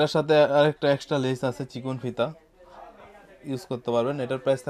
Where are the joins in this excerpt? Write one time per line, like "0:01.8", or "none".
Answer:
none